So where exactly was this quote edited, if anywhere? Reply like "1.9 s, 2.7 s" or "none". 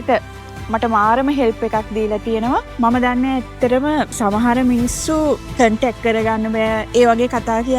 2.7 s, 4.1 s, 5.5 s, 6.8 s